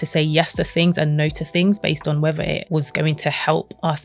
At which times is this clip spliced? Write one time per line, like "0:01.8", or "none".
0:02.6